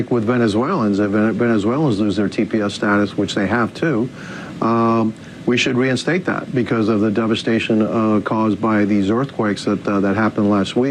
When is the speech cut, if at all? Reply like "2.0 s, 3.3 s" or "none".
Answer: none